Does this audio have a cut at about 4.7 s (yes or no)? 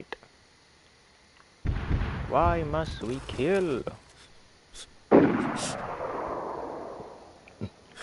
no